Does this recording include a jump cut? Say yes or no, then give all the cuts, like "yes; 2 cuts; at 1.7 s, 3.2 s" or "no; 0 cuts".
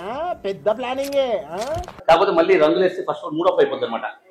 yes; 1 cut; at 1.9 s